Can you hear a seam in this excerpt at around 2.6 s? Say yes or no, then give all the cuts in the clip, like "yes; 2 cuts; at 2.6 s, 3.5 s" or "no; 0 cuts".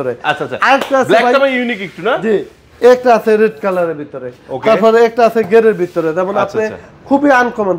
yes; 1 cut; at 2.6 s